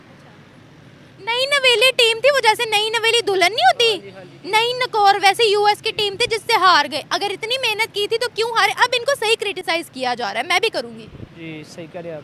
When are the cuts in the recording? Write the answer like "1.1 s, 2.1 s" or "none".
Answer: none